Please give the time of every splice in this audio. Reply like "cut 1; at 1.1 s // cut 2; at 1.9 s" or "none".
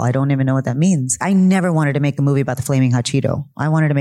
cut 1; at 1.2 s